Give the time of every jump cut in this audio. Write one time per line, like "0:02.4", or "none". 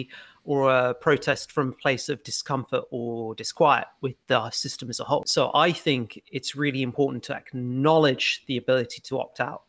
0:05.3